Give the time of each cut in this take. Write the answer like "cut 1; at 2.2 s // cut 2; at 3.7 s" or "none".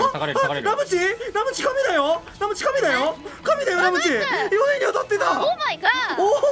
none

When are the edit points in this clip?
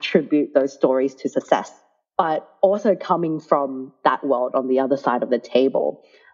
cut 1; at 2.5 s

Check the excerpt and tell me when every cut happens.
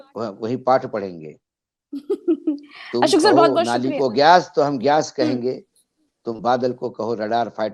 none

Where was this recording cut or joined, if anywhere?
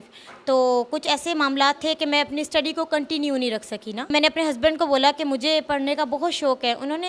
cut 1; at 4.1 s

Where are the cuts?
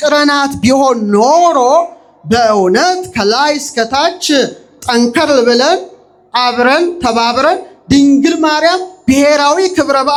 none

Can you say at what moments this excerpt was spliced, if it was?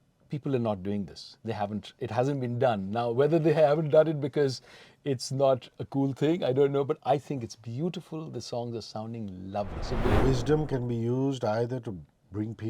cut 1; at 10.0 s

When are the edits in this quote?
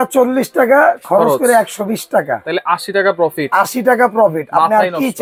none

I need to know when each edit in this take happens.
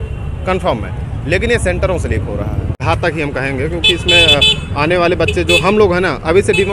cut 1; at 2.7 s

